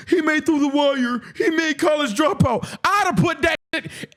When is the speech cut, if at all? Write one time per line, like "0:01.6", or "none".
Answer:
none